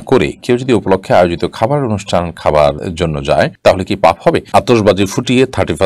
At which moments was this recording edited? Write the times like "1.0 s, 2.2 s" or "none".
2.9 s, 4.5 s